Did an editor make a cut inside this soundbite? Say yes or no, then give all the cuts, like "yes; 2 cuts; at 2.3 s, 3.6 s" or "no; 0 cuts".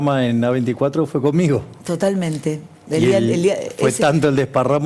no; 0 cuts